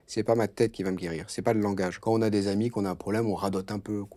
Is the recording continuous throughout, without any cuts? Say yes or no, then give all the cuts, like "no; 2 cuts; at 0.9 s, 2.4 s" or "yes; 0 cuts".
no; 1 cut; at 2.0 s